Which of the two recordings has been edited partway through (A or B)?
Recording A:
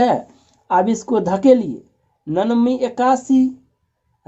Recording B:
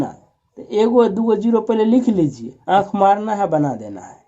B